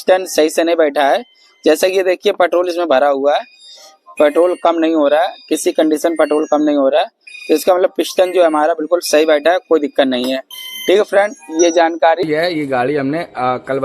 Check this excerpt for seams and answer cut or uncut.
cut